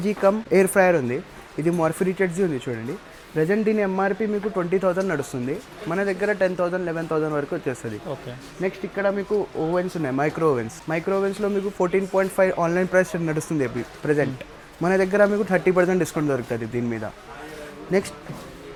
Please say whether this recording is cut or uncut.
uncut